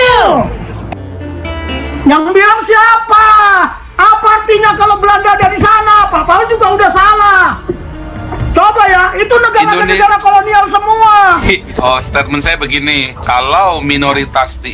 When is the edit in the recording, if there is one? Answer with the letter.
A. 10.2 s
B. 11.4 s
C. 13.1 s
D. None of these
B